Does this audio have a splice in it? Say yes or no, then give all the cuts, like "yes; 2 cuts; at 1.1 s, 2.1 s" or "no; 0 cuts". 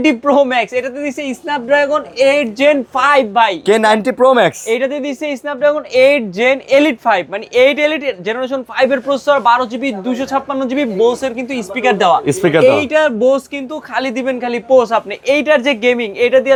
no; 0 cuts